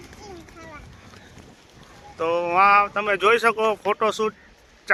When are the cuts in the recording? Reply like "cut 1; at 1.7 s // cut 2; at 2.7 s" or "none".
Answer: none